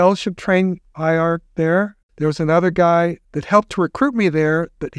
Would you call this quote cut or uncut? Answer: cut